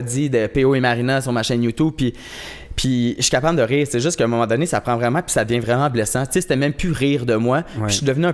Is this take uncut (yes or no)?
yes